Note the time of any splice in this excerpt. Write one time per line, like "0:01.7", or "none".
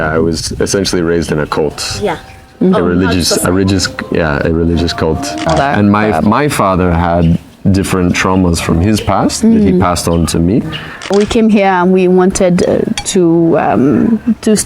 0:05.4
0:11.1